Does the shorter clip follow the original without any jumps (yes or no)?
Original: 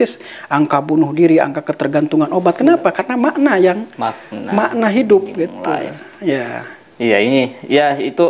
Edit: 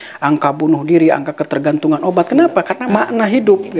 no